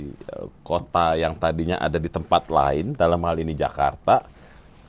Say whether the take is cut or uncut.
uncut